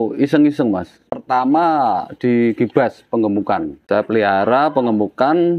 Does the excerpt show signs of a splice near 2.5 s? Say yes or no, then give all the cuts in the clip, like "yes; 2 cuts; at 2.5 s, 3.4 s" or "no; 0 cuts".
no; 2 cuts; at 1.0 s, 3.7 s